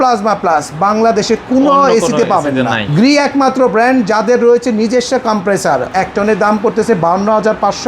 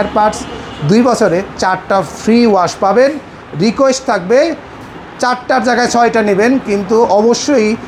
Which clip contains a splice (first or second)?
first